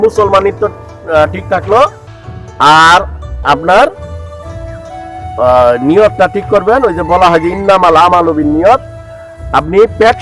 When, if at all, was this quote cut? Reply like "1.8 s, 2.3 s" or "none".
4.0 s, 5.4 s